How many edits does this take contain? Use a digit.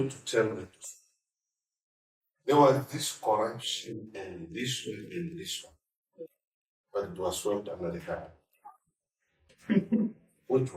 1